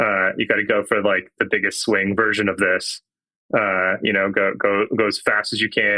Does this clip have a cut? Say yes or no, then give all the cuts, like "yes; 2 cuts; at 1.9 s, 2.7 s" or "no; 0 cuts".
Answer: no; 0 cuts